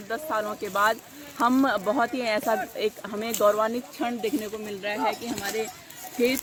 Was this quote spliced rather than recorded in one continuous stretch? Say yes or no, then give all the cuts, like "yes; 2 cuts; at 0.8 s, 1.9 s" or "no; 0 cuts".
no; 0 cuts